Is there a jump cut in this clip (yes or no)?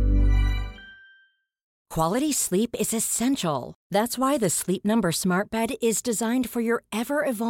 yes